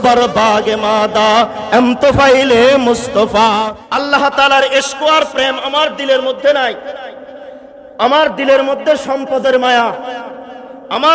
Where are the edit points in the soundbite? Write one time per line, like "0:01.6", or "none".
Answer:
0:03.8